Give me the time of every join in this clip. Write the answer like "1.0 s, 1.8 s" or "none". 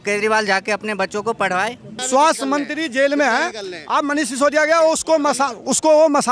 2.0 s